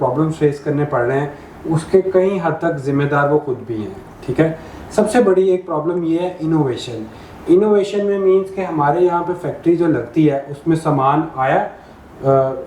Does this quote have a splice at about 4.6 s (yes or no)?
no